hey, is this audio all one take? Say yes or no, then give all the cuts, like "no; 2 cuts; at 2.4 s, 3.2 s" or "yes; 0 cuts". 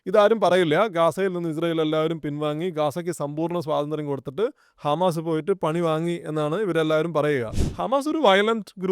no; 1 cut; at 7.6 s